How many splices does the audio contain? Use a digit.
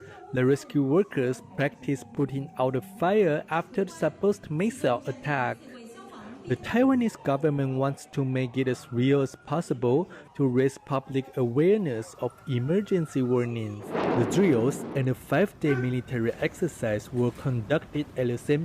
1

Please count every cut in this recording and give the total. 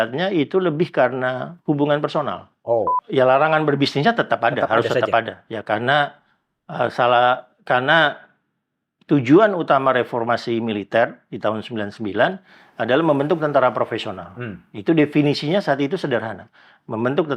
1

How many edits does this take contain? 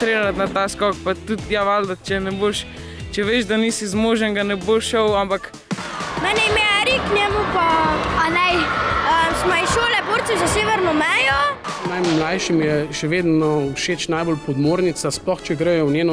2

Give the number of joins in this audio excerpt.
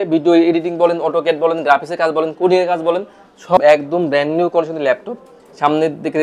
1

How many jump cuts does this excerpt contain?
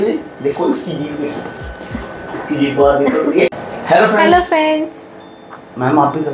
1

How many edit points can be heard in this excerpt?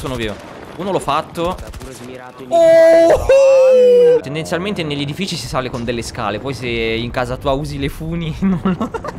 1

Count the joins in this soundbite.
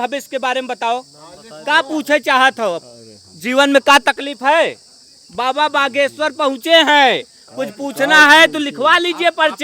0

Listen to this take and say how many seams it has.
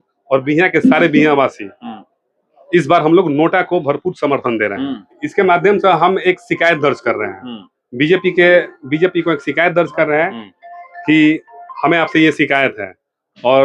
1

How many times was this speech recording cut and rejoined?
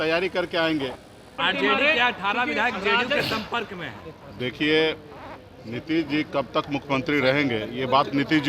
1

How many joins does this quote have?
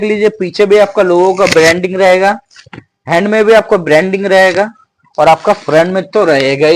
0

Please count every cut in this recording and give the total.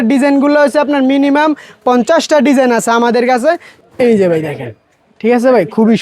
1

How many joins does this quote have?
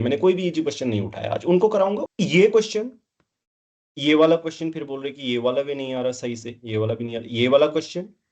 1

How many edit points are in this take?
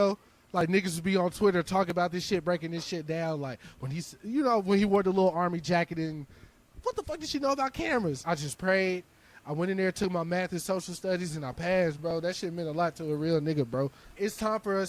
3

